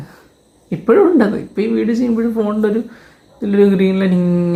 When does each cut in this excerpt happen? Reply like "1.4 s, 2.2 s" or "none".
none